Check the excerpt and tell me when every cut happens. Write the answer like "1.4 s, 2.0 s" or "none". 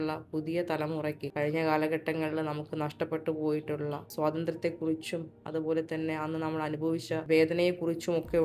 1.2 s, 4.0 s, 7.2 s

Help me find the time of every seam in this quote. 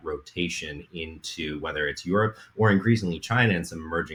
none

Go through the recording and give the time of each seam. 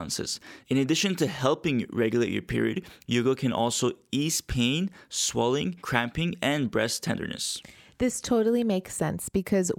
5.8 s

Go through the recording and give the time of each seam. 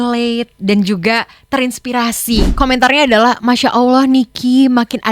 2.5 s

